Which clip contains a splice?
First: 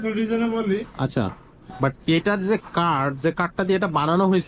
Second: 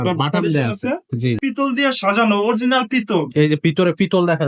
second; 1 cut; at 1.4 s

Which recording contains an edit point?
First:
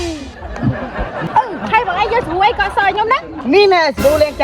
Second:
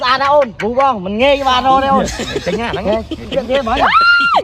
first; 2 cuts; at 1.2 s, 3.3 s

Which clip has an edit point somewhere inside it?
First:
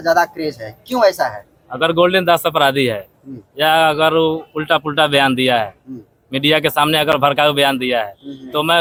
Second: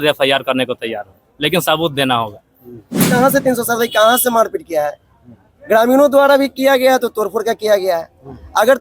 second; 1 cut; at 3.1 s

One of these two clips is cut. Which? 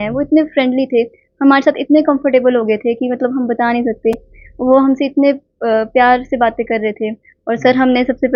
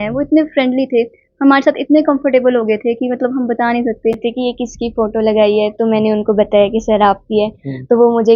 second; 1 cut; at 4.2 s

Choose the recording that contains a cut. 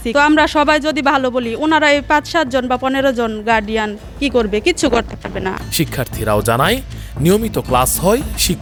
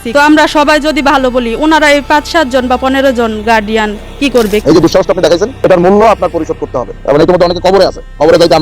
second; 2 cuts; at 4.6 s, 7.0 s

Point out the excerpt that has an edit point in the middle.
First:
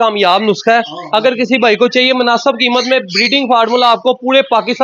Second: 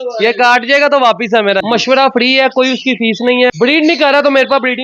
second; 2 cuts; at 1.6 s, 3.5 s

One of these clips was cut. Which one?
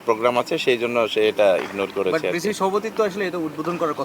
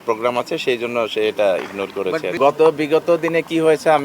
second; 1 cut; at 2.4 s

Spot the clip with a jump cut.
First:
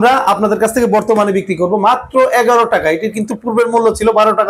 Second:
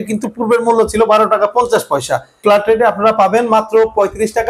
second; 1 cut; at 2.4 s

